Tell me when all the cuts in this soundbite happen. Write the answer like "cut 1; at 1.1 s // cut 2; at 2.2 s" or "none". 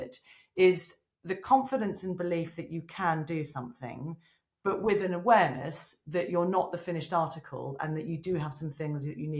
none